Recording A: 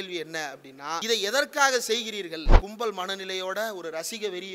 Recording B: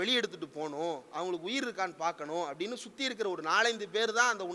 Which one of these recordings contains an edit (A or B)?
A